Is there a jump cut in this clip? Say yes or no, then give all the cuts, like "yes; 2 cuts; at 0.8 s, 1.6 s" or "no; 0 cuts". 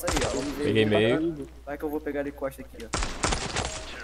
yes; 1 cut; at 1.5 s